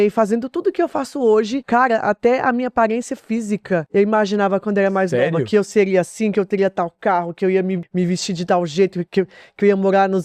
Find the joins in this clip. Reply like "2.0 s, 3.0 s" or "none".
1.6 s, 3.9 s, 7.8 s

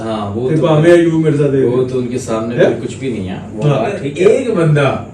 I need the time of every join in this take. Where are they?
4.1 s

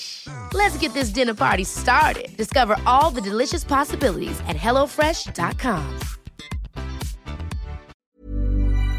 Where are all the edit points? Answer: 7.9 s

